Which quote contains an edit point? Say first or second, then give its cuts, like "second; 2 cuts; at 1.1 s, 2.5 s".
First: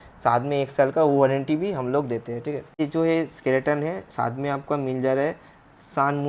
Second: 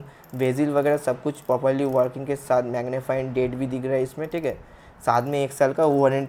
first; 1 cut; at 2.8 s